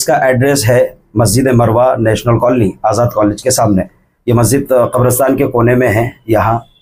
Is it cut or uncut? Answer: uncut